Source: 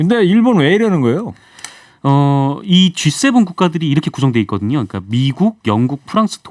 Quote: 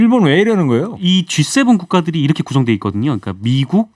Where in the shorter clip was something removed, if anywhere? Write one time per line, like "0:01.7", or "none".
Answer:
0:01.0